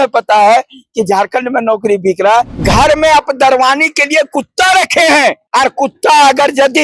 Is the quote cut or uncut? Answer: cut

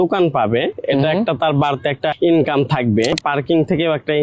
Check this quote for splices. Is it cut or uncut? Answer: cut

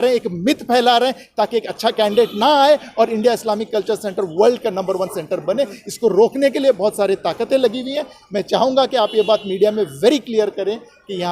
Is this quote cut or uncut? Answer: uncut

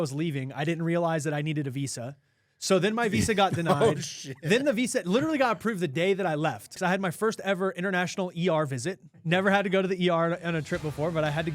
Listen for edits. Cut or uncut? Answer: cut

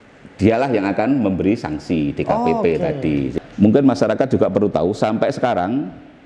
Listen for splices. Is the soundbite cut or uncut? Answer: cut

